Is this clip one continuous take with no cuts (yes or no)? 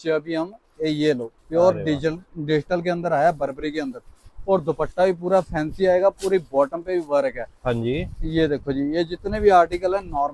yes